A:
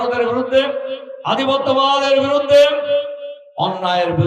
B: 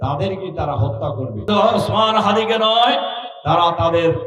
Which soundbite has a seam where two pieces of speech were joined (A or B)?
B